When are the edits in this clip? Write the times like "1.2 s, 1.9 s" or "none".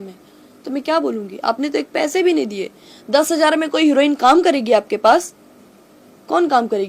none